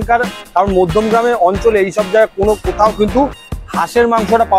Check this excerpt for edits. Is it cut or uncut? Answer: uncut